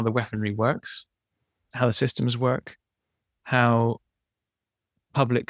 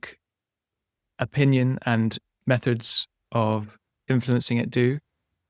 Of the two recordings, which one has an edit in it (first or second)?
first